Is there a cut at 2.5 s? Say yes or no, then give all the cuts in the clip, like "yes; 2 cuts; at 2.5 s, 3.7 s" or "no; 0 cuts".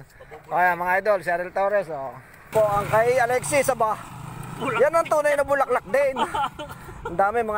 yes; 1 cut; at 2.5 s